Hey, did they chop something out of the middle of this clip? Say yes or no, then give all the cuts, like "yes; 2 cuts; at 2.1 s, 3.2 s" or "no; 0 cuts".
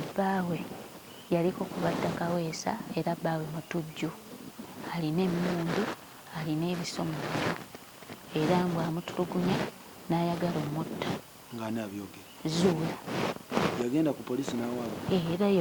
no; 0 cuts